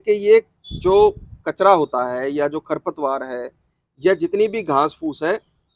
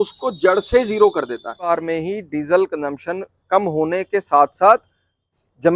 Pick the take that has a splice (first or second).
second